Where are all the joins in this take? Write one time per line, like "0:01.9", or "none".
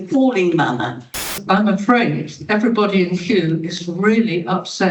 0:01.2